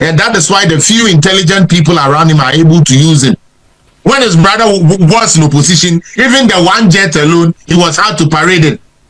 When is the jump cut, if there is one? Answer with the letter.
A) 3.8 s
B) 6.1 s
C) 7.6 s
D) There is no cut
A